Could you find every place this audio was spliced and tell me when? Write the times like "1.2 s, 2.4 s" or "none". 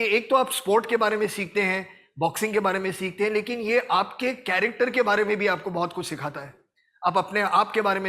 none